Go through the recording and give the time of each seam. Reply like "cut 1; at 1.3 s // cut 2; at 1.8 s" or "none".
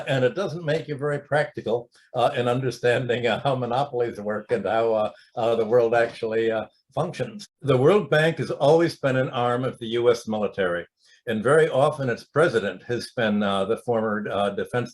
cut 1; at 7.4 s